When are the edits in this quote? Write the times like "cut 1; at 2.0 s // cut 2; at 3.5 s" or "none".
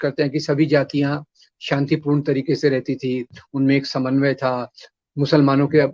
none